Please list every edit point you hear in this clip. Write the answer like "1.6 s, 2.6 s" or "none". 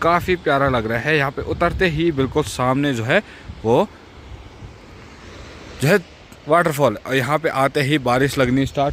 none